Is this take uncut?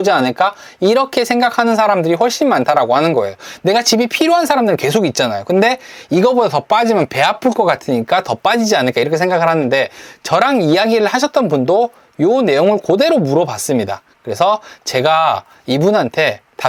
yes; 0 cuts

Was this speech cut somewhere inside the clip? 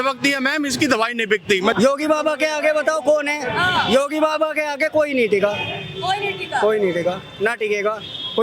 yes; 1 cut; at 1.7 s

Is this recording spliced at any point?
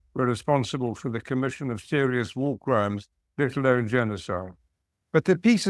no; 0 cuts

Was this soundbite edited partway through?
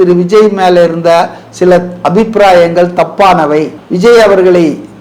yes; 1 cut; at 3.8 s

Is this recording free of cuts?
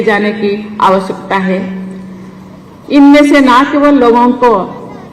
yes; 0 cuts

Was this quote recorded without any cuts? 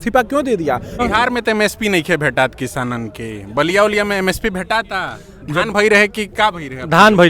no; 1 cut; at 1.0 s

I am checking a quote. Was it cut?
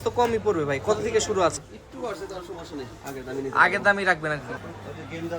yes; 2 cuts; at 1.5 s, 4.6 s

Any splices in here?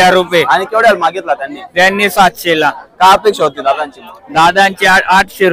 no; 0 cuts

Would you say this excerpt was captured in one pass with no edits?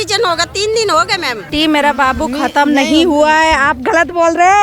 no; 1 cut; at 1.5 s

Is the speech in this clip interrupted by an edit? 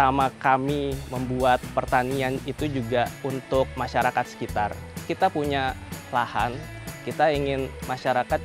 yes; 4 cuts; at 1.1 s, 1.7 s, 3.6 s, 5.1 s

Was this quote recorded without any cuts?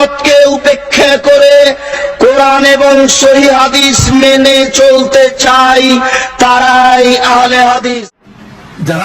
no; 1 cut; at 7.9 s

